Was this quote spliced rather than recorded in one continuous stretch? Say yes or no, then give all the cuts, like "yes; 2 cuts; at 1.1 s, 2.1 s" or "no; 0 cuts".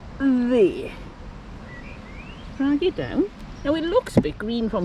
yes; 2 cuts; at 1.6 s, 3.5 s